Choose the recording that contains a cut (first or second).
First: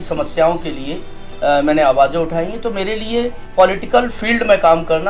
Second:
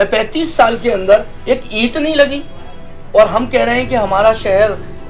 first